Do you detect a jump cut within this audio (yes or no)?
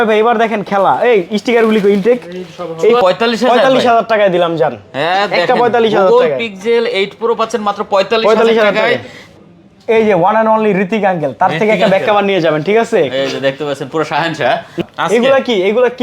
yes